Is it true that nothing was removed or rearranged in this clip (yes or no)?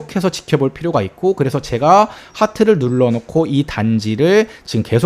yes